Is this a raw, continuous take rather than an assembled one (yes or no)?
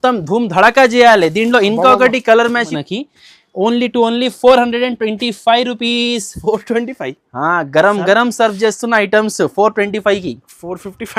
no